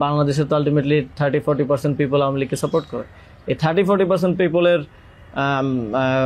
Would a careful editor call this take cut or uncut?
uncut